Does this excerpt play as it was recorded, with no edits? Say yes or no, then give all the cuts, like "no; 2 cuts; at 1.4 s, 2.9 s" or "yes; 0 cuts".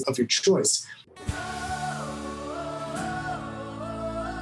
no; 1 cut; at 1.1 s